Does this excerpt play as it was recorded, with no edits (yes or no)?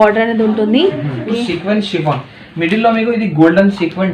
no